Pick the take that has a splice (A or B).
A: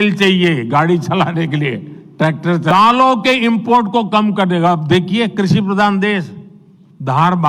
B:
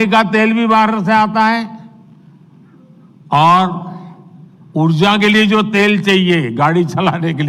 A